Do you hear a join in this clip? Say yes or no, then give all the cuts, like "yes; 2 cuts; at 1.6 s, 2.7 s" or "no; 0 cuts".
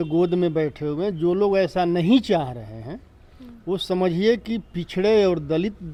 no; 0 cuts